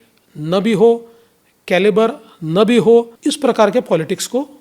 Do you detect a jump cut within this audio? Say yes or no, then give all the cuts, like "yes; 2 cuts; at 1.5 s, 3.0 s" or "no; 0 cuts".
yes; 1 cut; at 3.1 s